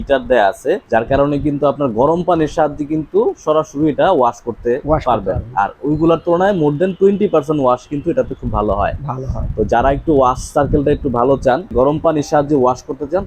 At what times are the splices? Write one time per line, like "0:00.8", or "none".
0:00.8
0:11.7